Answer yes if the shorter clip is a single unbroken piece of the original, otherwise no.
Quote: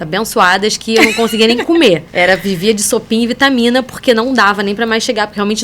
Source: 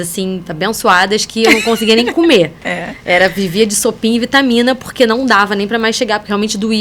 no